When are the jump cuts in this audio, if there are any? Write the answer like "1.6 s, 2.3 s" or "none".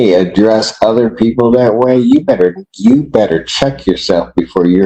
none